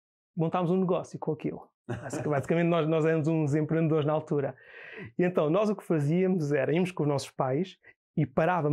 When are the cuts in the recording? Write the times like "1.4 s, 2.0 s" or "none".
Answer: none